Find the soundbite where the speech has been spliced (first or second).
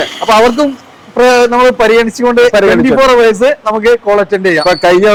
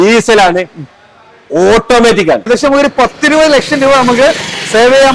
second